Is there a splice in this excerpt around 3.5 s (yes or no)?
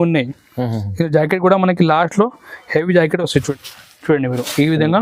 yes